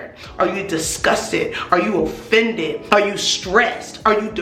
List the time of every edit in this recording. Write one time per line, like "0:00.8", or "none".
0:02.8